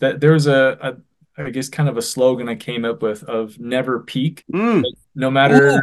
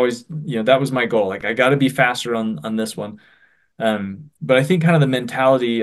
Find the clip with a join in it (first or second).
first